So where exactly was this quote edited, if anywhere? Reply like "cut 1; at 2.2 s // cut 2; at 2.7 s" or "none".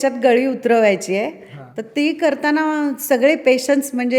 none